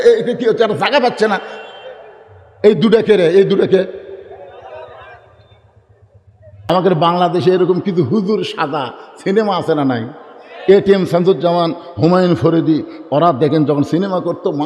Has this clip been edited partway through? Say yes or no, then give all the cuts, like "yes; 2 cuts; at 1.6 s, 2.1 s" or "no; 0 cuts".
yes; 1 cut; at 6.7 s